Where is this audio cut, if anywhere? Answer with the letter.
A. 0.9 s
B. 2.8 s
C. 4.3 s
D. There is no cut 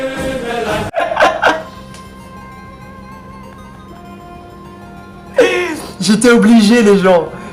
A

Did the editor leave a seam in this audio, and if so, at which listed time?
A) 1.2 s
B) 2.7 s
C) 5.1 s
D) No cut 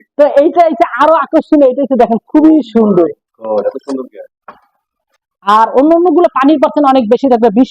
C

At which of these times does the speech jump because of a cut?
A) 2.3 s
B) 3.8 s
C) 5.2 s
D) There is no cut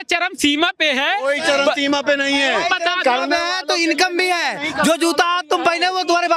D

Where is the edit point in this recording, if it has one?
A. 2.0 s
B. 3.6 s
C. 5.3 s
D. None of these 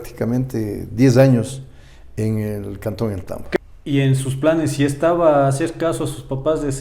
B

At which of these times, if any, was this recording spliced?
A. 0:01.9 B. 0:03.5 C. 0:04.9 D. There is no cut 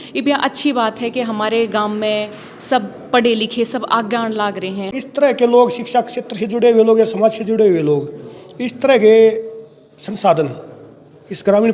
C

